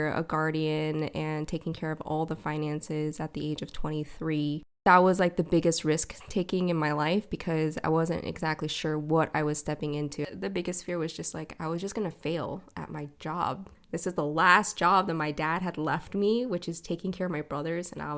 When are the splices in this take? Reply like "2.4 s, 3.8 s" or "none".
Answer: 4.8 s, 10.2 s, 13.7 s